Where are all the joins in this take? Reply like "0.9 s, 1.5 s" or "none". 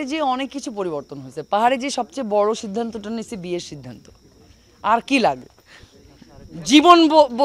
none